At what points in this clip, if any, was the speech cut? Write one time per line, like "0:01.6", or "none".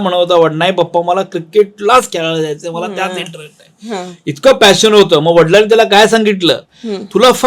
none